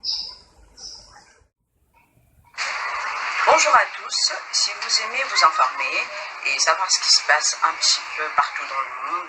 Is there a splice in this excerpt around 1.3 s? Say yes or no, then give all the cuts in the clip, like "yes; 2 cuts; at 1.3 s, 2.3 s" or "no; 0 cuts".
yes; 1 cut; at 1.3 s